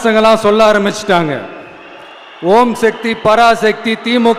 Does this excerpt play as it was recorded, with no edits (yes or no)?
yes